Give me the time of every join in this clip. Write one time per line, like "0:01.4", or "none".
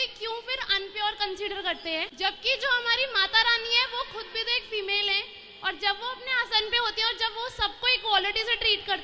0:02.1